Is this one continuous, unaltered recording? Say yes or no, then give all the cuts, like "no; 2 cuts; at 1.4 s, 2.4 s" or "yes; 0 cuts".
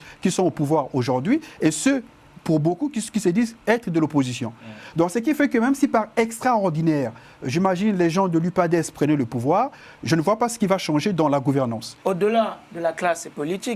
no; 1 cut; at 11.9 s